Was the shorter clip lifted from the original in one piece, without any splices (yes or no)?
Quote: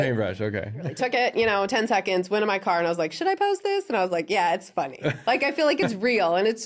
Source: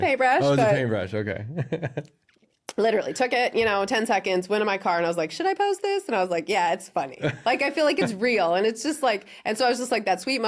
no